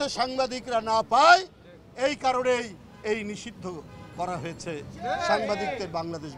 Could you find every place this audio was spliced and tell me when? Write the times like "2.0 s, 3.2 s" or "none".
none